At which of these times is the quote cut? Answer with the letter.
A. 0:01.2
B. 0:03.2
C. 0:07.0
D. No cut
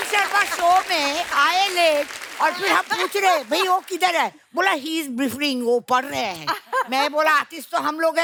D